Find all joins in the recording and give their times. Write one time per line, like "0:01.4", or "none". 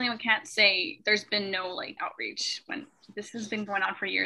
0:00.9

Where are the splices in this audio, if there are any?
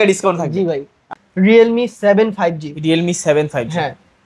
0:01.2

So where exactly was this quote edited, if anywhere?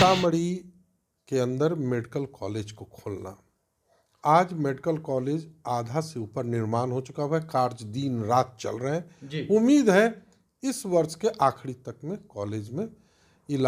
none

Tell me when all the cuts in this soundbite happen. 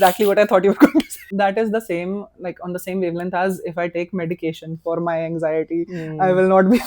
0:01.2

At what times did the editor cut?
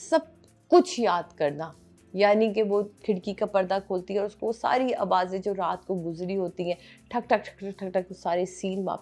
none

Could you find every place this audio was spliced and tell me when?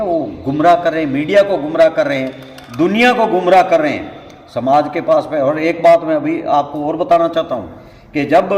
none

